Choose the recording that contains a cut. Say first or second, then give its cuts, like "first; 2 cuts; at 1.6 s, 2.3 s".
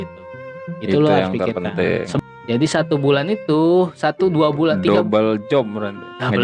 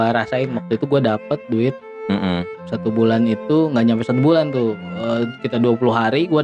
first; 1 cut; at 2.1 s